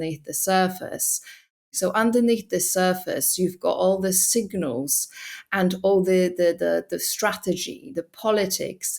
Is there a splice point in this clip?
yes; 1 cut; at 1.7 s

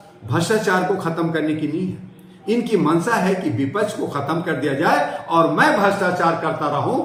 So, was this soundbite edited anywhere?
no; 0 cuts

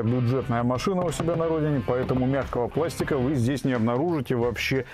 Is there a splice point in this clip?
no; 0 cuts

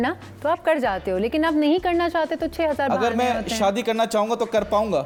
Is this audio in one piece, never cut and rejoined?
yes; 0 cuts

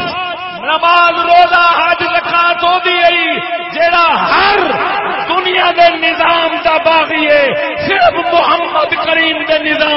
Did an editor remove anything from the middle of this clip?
no; 0 cuts

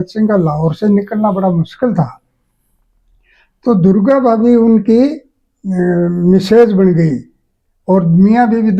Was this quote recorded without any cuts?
yes; 0 cuts

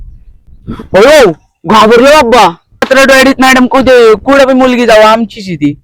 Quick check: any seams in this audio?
yes; 1 cut; at 2.9 s

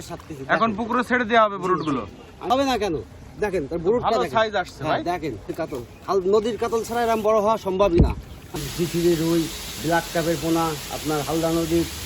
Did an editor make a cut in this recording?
yes; 3 cuts; at 2.5 s, 5.6 s, 8.5 s

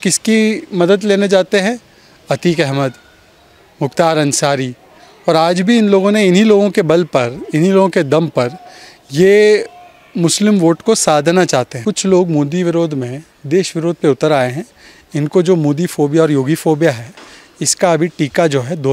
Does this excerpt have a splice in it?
yes; 1 cut; at 11.8 s

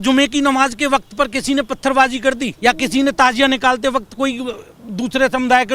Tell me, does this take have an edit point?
yes; 1 cut; at 2.5 s

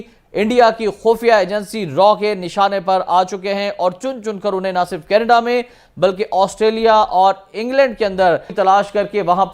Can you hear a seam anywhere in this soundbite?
yes; 1 cut; at 8.5 s

